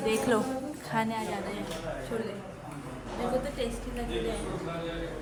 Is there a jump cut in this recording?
no; 0 cuts

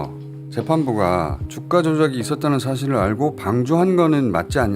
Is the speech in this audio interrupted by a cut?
yes; 1 cut; at 1.5 s

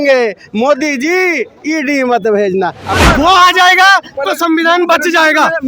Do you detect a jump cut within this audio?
yes; 1 cut; at 2.9 s

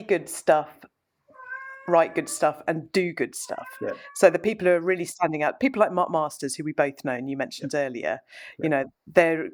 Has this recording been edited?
no; 0 cuts

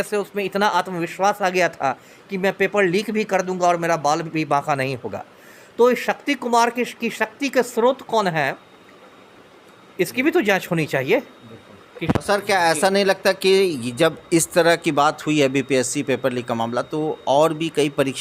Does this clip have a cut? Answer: no; 0 cuts

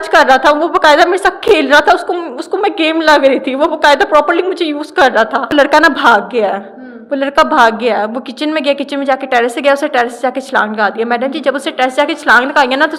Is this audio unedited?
yes; 0 cuts

